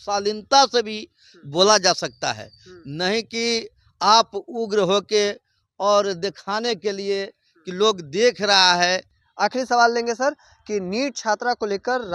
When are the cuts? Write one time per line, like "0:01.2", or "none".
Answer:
0:09.2

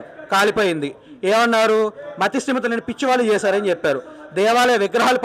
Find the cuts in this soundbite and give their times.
none

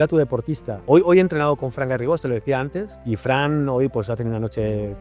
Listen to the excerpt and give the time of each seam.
0:00.8
0:02.9

